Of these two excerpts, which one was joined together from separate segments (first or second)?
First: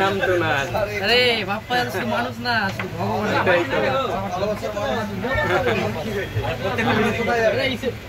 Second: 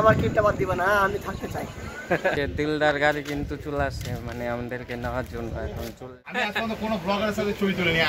second